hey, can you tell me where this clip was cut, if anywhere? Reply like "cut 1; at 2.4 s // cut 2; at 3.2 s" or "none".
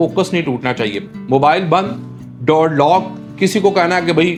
none